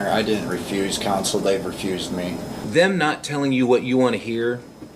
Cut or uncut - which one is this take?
cut